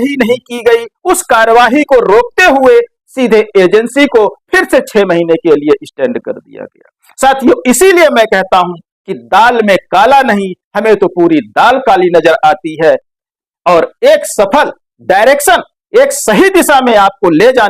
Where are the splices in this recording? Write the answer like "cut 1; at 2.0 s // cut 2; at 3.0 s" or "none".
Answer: cut 1; at 13.1 s